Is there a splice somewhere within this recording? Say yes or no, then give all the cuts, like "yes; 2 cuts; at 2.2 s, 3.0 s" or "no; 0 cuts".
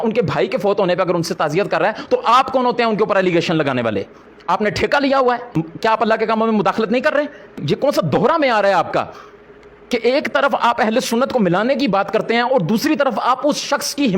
no; 0 cuts